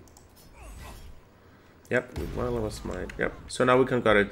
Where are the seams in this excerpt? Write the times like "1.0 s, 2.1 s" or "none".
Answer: 3.4 s

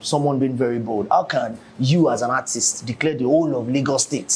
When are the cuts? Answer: none

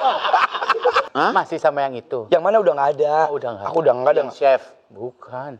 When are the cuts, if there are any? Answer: 1.0 s

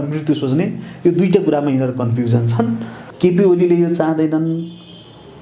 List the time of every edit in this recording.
3.0 s

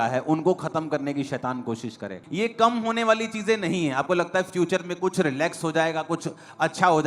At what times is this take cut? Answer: 2.2 s

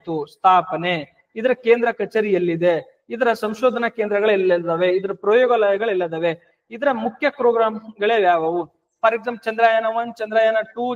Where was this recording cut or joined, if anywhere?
none

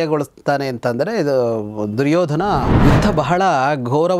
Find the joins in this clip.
2.7 s

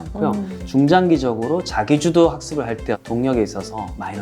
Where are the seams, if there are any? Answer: 3.0 s

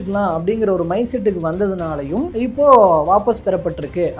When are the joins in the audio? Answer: 2.3 s

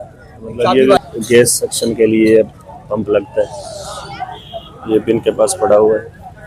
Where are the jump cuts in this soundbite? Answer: 1.0 s

